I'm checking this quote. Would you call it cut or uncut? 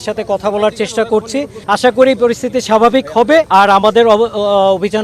cut